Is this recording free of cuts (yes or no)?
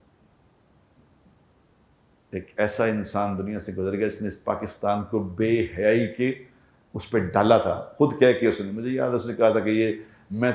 yes